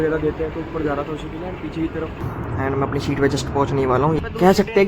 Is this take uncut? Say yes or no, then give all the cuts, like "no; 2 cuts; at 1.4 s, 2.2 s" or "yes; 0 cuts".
no; 2 cuts; at 2.2 s, 4.2 s